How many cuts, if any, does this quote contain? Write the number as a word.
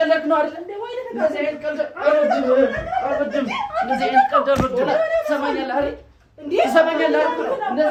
zero